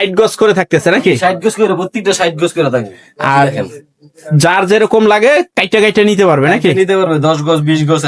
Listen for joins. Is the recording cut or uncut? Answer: uncut